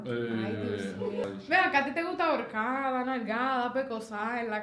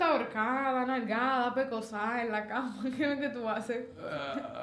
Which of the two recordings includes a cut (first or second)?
first